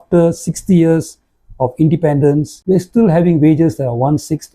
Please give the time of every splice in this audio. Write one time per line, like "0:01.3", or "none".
0:02.5